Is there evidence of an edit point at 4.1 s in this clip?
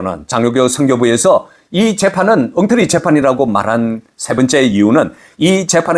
no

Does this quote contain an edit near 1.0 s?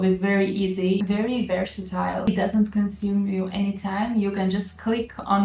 yes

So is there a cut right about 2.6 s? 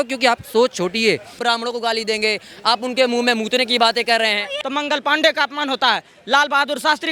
no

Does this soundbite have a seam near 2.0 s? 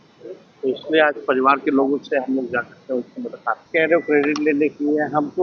no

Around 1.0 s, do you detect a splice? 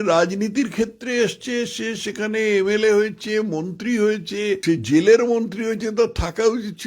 no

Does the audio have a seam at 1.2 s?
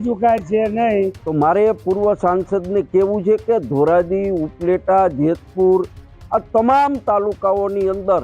yes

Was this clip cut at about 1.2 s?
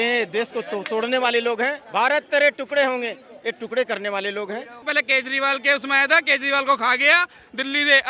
no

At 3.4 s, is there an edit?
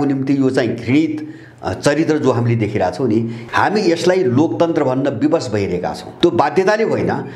yes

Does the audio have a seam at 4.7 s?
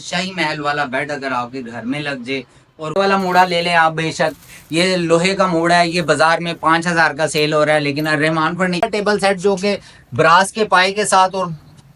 no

